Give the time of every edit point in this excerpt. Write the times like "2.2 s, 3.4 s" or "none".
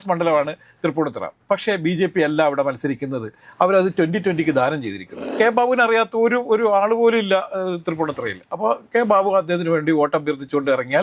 5.2 s